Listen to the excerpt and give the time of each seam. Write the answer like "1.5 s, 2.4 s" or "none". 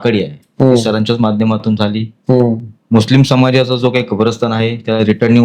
none